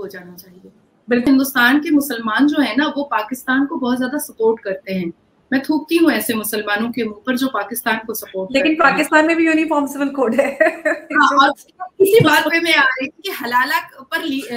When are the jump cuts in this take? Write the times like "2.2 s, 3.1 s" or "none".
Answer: 1.2 s